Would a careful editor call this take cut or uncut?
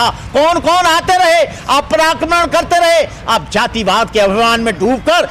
uncut